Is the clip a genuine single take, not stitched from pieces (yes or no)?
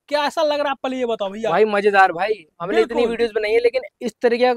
yes